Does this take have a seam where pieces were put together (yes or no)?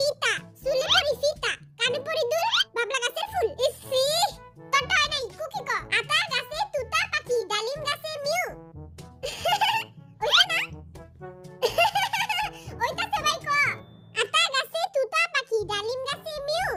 no